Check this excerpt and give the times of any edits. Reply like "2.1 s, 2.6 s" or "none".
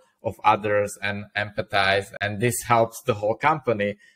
2.1 s